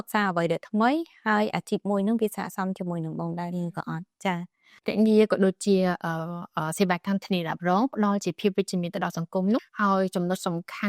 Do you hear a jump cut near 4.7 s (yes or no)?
yes